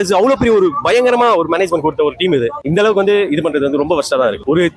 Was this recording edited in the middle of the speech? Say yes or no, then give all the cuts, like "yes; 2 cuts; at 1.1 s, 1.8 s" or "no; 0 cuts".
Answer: no; 0 cuts